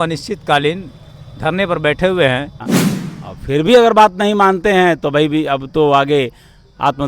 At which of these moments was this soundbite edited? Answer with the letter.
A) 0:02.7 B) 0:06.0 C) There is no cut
A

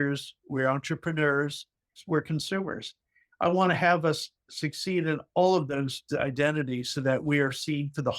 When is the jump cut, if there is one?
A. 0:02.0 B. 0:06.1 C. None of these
A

